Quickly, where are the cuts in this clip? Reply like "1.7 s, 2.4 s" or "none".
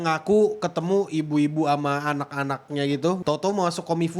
3.2 s